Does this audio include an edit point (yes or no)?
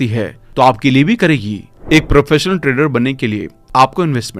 yes